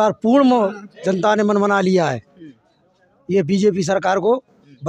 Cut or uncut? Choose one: uncut